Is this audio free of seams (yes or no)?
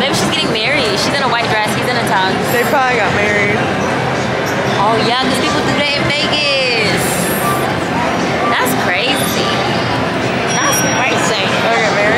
yes